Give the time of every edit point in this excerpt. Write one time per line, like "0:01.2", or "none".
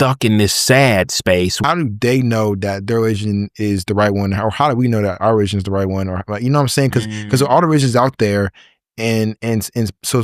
0:01.6